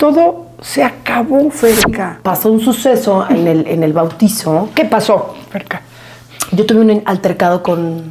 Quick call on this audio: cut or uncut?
cut